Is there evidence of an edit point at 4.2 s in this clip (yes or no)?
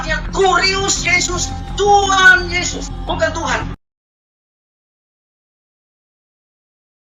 no